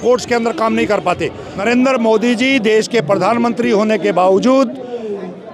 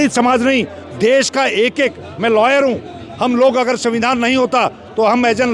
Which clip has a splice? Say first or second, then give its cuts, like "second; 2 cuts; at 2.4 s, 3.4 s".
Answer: first; 1 cut; at 1.5 s